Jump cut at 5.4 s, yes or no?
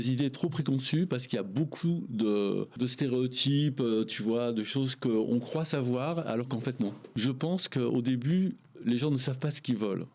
no